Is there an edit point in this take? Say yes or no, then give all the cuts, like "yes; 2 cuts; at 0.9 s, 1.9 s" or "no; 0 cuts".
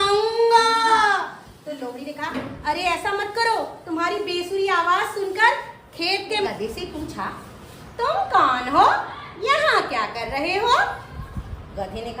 yes; 1 cut; at 6.5 s